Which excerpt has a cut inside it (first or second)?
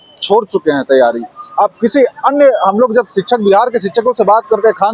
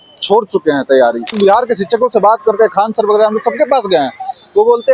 second